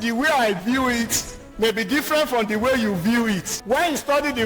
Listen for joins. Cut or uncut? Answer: cut